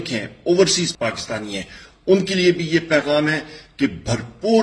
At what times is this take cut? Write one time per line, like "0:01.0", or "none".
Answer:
0:00.9